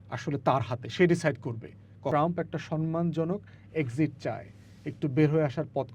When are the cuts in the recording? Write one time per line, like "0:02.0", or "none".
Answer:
0:02.1